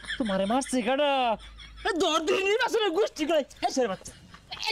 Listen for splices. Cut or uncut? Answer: uncut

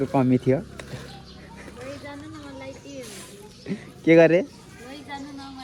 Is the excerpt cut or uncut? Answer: uncut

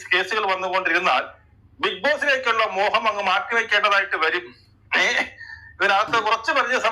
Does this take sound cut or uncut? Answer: uncut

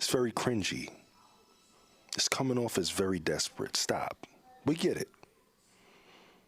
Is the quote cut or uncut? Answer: uncut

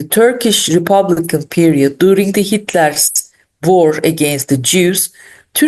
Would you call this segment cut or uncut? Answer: uncut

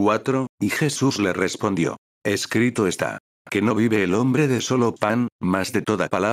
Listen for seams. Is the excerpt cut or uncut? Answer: cut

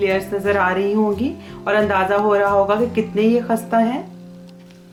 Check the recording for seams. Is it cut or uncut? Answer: uncut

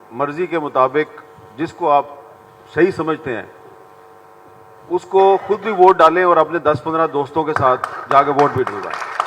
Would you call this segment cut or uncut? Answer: uncut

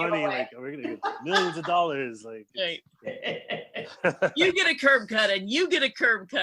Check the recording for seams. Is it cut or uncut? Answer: uncut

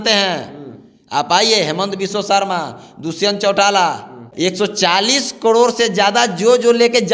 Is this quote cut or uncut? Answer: cut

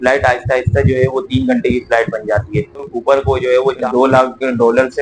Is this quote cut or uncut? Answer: cut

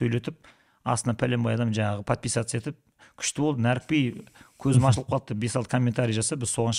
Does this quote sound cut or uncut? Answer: uncut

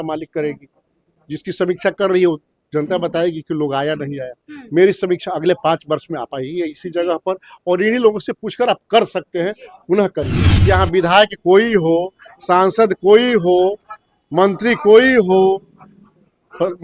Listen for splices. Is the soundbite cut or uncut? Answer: cut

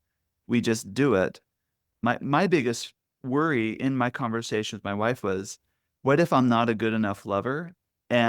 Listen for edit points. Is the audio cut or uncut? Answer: cut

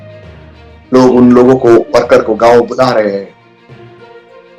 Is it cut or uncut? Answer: uncut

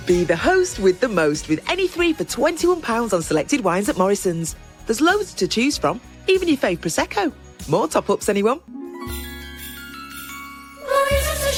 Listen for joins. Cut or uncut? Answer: uncut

